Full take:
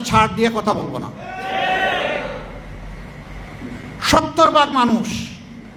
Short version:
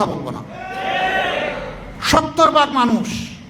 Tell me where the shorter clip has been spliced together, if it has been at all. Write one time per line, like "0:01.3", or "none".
0:01.9